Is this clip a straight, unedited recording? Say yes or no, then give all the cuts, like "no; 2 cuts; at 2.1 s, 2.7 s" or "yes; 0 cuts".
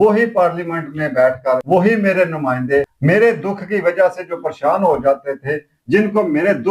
no; 2 cuts; at 1.6 s, 2.9 s